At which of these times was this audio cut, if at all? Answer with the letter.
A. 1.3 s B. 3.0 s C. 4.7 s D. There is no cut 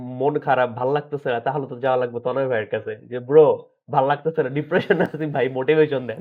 D